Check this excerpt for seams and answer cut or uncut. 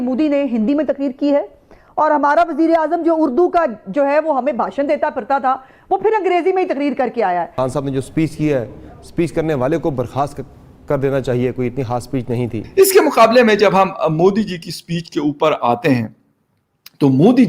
cut